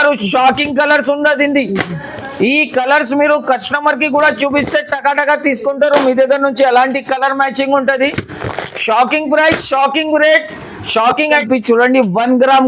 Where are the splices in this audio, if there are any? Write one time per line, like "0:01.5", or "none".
0:11.4

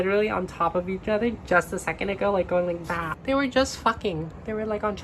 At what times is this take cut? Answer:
none

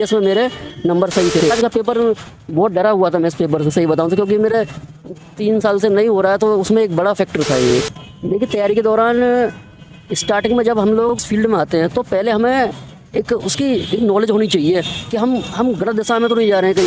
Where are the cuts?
0:01.5
0:07.7
0:11.1

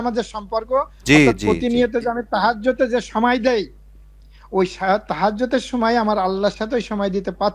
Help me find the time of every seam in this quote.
none

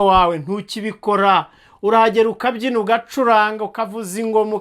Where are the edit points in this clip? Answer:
none

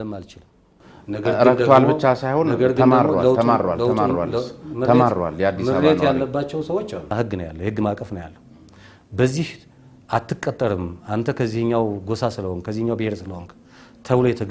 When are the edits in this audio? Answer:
0:07.1

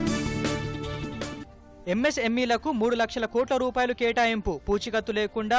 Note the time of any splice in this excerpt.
0:01.6

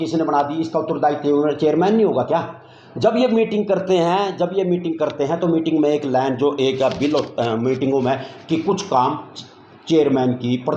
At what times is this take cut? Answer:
none

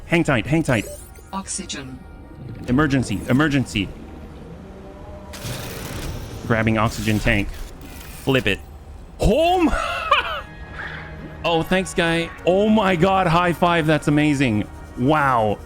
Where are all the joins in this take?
0:12.3

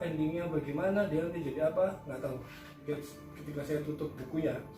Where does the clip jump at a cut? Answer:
0:02.8

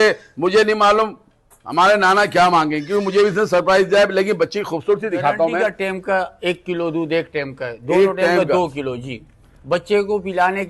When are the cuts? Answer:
0:05.6

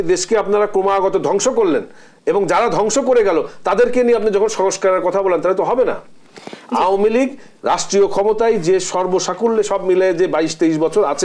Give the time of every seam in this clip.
none

